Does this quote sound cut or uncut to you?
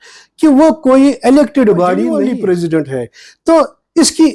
cut